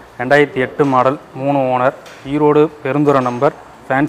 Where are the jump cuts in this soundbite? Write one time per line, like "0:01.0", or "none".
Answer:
none